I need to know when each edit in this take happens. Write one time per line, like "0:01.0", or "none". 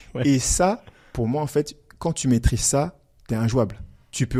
none